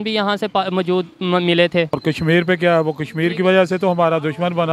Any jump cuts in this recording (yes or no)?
yes